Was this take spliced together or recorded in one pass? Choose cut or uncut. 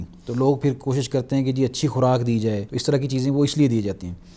cut